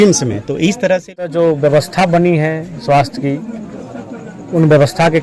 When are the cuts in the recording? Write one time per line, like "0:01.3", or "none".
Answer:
0:01.3